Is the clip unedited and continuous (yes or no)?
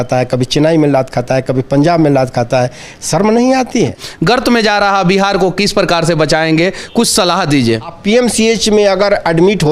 no